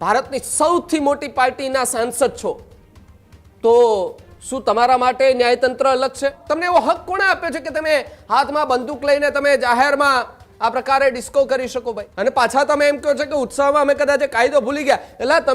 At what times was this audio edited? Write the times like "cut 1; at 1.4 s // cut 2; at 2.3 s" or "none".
cut 1; at 6.4 s // cut 2; at 12.0 s